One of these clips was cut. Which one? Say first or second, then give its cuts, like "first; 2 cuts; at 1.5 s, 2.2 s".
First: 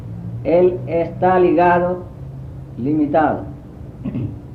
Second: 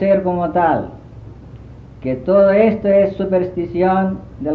second; 1 cut; at 3.0 s